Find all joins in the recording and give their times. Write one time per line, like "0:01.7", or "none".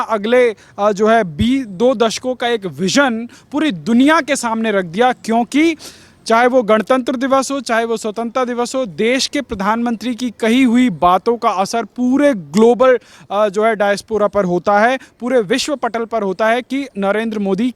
none